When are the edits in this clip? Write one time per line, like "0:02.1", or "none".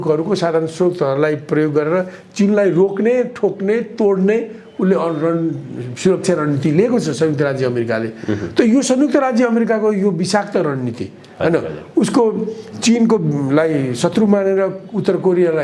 none

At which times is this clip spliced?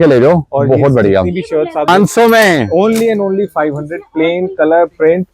0:01.9

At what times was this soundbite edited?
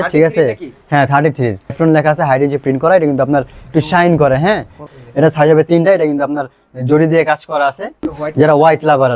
0:01.8
0:04.8
0:08.1

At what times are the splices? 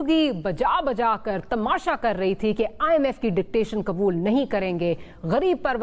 none

